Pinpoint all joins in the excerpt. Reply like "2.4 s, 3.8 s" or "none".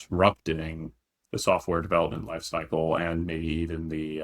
none